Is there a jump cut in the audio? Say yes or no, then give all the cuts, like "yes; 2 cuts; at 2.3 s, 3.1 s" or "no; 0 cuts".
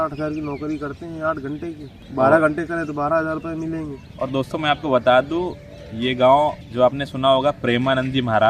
yes; 3 cuts; at 1.9 s, 4.0 s, 6.6 s